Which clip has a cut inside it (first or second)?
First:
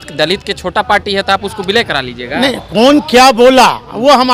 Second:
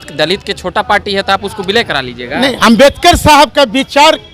second